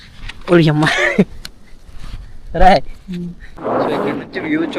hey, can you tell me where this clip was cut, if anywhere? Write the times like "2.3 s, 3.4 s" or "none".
3.4 s